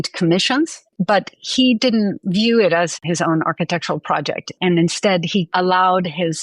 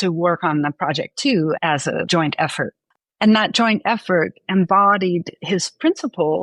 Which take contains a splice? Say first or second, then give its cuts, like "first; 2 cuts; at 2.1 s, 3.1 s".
first; 2 cuts; at 0.9 s, 2.9 s